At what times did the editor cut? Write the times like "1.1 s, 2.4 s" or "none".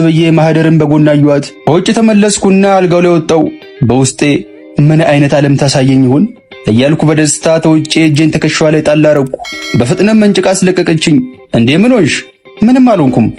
1.5 s